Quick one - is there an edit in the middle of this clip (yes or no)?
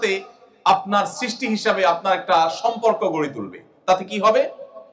no